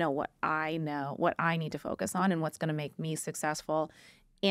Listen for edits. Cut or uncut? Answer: uncut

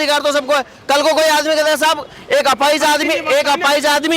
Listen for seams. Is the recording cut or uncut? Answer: uncut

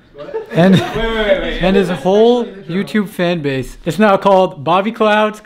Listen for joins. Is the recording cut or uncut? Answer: cut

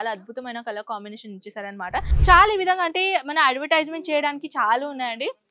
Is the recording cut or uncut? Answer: cut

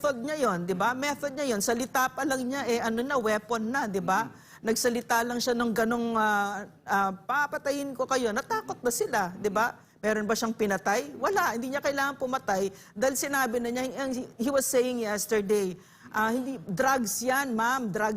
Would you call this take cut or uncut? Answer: uncut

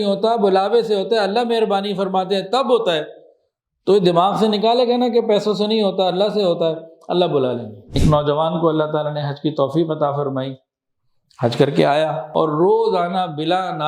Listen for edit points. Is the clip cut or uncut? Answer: cut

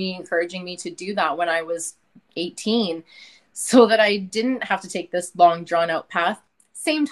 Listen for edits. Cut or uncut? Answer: uncut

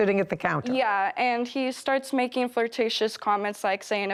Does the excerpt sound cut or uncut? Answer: uncut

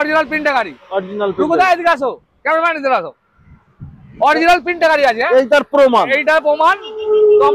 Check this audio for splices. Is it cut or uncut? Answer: uncut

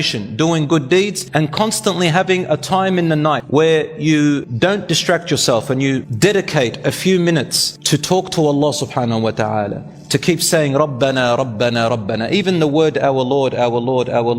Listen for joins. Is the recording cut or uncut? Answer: cut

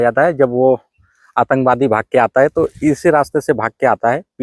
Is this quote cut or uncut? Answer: uncut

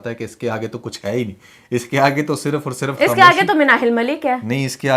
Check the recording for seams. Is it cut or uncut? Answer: uncut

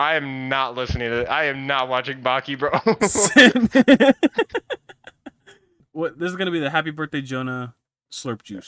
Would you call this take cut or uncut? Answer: cut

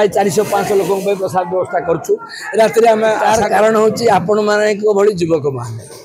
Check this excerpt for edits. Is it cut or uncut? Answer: cut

